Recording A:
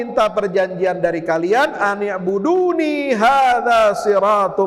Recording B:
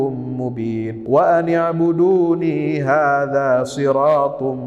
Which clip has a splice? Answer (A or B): B